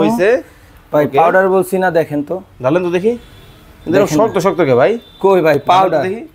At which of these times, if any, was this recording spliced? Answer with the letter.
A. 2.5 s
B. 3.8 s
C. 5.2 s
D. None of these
D